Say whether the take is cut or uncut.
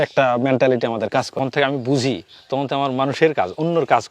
cut